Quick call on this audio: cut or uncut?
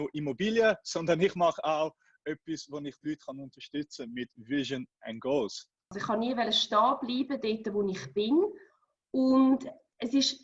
cut